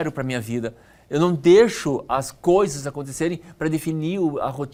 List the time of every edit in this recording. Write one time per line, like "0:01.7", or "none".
none